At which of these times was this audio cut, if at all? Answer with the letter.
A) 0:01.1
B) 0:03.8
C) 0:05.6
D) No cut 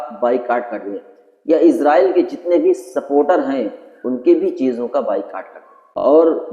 C